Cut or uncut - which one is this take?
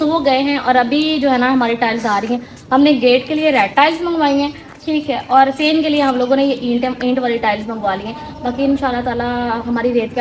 uncut